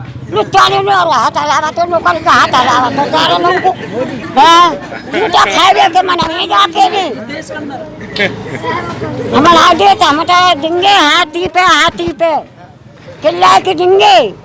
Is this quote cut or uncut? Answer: uncut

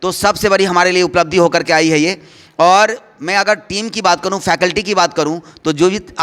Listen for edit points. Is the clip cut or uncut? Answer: uncut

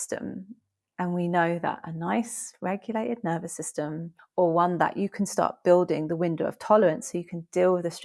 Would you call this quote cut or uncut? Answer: cut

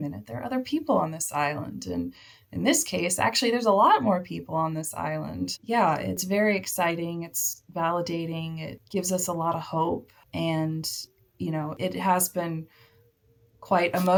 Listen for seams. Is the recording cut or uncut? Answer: uncut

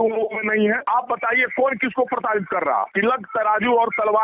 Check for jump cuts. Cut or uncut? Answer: cut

